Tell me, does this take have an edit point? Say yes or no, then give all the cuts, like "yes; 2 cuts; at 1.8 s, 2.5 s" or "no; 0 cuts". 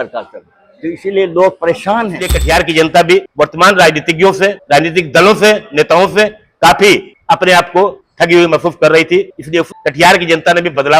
yes; 6 cuts; at 2.3 s, 3.3 s, 4.6 s, 7.1 s, 8.0 s, 9.6 s